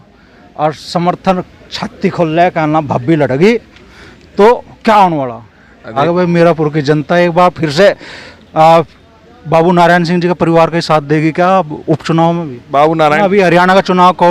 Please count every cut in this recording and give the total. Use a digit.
2